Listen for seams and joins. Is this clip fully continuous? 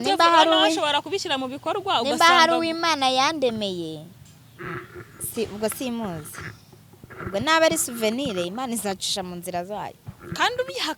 yes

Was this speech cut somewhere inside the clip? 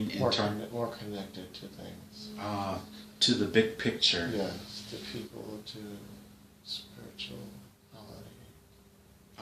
yes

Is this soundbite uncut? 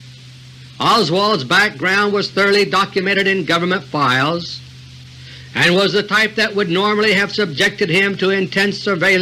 no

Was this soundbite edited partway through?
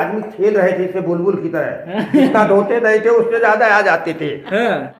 no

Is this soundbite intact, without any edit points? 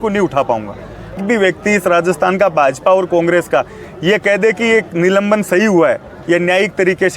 no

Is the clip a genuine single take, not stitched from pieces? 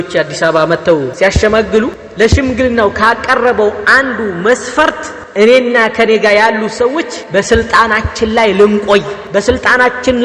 no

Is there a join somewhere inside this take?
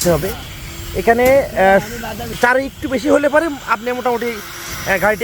yes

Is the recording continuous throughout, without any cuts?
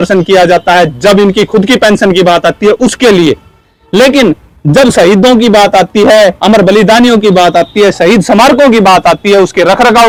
yes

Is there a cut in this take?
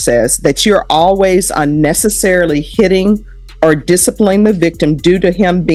no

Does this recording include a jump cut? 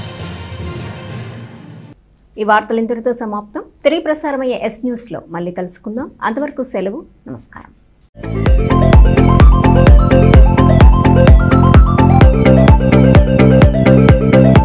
no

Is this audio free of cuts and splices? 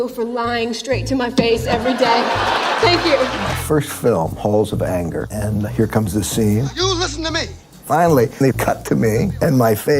no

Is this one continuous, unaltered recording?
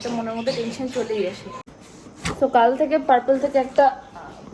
no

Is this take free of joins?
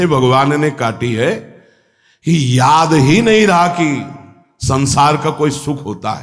yes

